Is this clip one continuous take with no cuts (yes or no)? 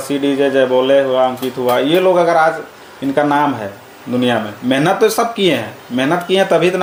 yes